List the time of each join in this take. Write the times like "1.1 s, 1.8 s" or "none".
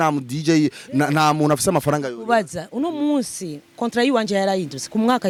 none